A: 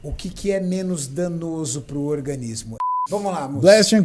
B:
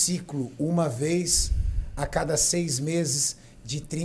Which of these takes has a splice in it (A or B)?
A